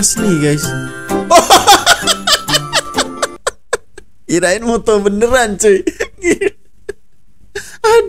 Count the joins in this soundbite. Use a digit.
0